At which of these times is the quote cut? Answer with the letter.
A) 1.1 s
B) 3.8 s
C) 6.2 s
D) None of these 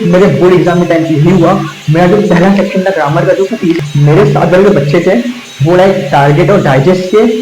B